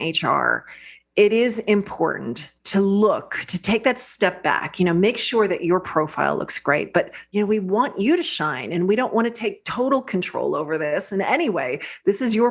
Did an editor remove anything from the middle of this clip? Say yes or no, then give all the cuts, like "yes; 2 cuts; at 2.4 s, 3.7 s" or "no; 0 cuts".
yes; 1 cut; at 7.2 s